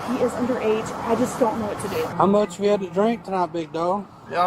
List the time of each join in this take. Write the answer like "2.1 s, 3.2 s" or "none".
2.1 s